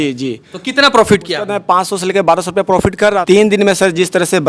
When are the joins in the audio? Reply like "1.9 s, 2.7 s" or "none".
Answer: 3.2 s